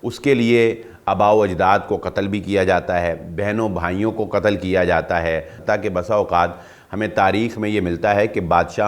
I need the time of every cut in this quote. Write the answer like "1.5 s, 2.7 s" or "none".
5.5 s